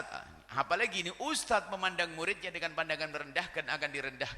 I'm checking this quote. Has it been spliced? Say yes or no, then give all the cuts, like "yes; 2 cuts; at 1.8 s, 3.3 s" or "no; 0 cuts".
no; 0 cuts